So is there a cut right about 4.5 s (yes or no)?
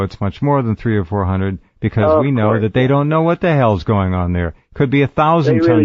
no